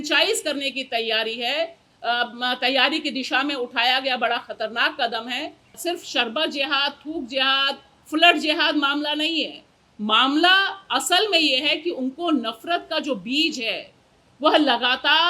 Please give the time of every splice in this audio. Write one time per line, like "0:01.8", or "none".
0:05.7